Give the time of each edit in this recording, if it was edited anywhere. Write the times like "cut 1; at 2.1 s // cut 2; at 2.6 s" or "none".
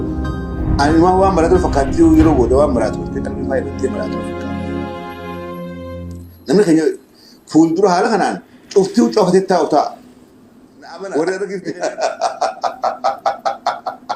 cut 1; at 11.6 s